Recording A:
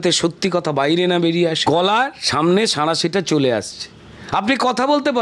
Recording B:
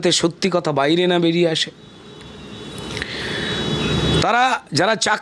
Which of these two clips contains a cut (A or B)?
A